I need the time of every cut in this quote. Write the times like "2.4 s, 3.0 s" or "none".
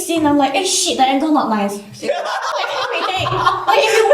2.5 s